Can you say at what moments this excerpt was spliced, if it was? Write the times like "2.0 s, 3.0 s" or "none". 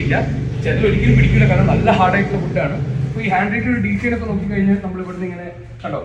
none